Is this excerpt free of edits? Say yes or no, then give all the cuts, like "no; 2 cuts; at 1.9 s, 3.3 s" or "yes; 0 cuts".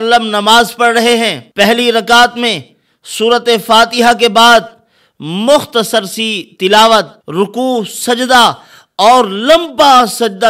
no; 2 cuts; at 1.4 s, 7.2 s